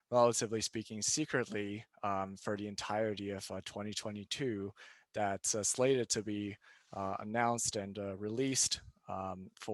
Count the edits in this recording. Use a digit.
0